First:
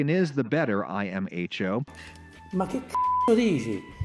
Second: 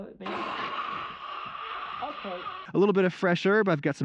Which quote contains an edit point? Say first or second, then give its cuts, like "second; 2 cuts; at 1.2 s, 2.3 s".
second; 1 cut; at 2.6 s